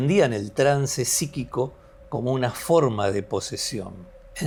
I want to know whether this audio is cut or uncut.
uncut